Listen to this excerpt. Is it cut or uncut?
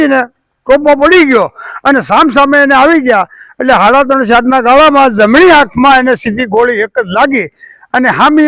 uncut